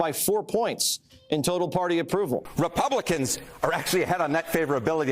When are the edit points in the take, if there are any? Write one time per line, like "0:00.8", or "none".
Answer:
0:02.5